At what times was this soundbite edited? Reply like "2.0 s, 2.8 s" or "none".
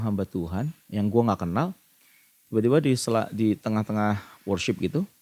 none